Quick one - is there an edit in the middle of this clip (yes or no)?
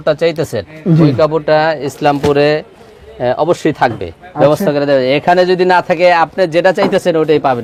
no